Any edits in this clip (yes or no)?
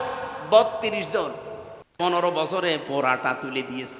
no